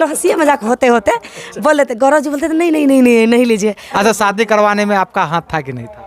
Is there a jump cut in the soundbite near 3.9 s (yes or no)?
yes